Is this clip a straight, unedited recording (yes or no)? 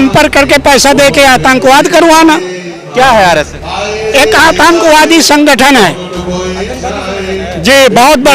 no